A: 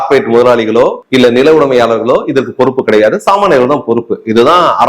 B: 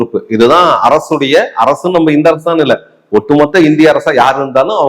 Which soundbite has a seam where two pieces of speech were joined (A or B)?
A